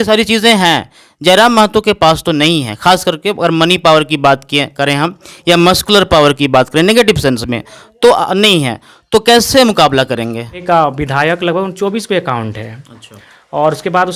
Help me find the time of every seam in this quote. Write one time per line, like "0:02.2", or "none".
0:10.6